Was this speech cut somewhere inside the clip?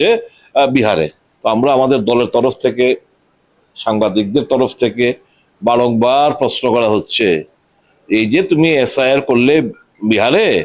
yes; 1 cut; at 1.2 s

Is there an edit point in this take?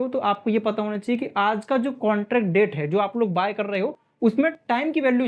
no; 0 cuts

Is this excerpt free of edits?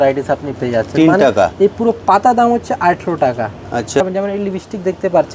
no; 1 cut; at 4.0 s

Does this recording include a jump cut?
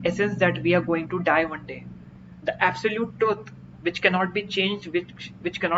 no; 0 cuts

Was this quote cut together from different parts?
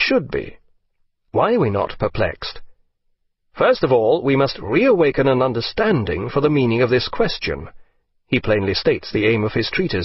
no; 0 cuts

